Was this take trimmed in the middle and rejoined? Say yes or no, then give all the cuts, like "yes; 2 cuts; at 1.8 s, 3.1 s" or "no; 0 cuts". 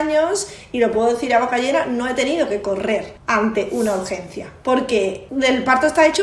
yes; 2 cuts; at 3.2 s, 5.2 s